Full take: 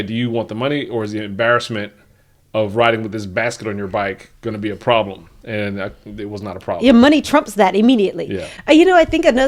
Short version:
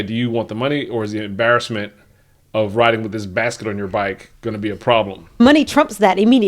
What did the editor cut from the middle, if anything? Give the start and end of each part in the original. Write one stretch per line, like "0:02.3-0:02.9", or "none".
0:05.4-0:07.0